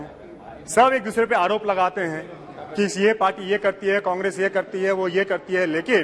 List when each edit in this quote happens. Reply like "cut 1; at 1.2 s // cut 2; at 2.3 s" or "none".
none

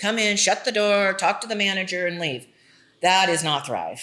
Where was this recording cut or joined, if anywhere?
none

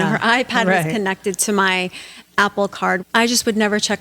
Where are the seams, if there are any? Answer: cut 1; at 3.0 s

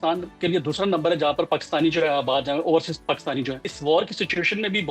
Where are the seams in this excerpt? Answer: cut 1; at 3.7 s

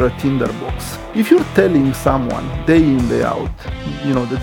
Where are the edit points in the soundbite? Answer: cut 1; at 0.9 s

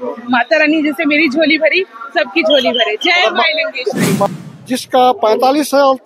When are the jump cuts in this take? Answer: cut 1; at 4.3 s

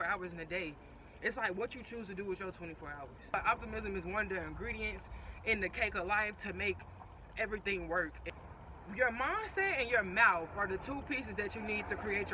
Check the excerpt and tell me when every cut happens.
cut 1; at 3.3 s // cut 2; at 8.2 s

